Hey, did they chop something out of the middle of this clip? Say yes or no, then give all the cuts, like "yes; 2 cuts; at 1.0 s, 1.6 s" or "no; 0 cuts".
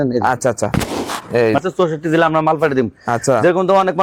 yes; 1 cut; at 1.6 s